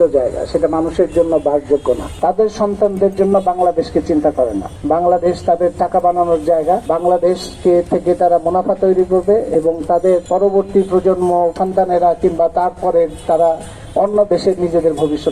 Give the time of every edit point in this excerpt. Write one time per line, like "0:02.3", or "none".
0:02.1
0:04.7
0:06.8
0:10.2
0:11.6